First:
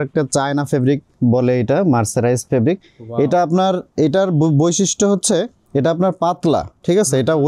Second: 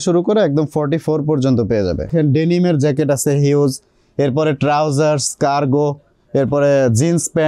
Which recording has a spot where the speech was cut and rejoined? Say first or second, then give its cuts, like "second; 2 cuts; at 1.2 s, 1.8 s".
second; 1 cut; at 2.1 s